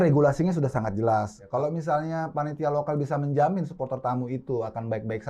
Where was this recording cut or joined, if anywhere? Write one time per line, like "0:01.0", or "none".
0:01.4

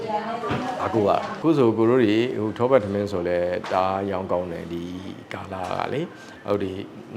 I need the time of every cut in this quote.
0:01.3

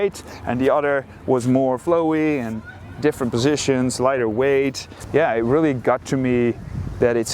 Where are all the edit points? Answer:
0:04.9

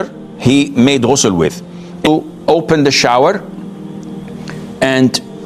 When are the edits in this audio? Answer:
0:02.1

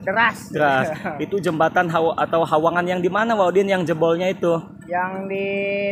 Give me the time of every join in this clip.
0:01.0

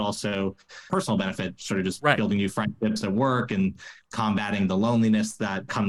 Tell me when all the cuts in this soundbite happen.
none

